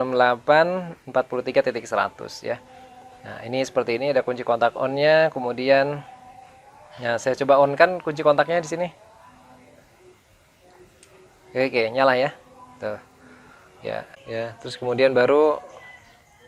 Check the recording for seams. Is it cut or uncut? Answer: cut